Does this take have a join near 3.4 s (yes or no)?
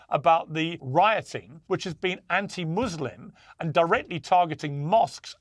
no